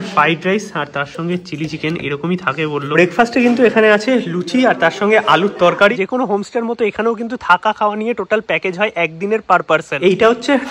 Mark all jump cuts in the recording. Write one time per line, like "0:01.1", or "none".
0:02.9
0:05.9